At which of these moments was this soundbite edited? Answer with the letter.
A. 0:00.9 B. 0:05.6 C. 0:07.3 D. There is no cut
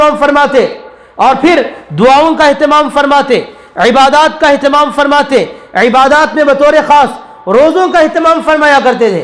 D